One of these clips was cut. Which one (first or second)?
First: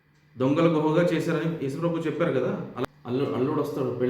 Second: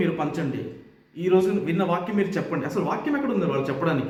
first